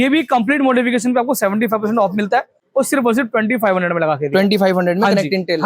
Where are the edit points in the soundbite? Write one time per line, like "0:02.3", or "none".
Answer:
0:02.6